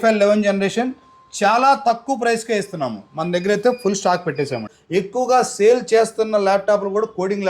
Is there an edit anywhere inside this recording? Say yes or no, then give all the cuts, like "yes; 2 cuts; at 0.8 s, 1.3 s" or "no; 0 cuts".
yes; 1 cut; at 4.8 s